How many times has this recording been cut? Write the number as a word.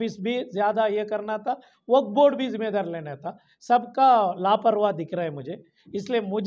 zero